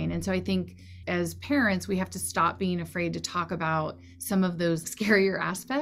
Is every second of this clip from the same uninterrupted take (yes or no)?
no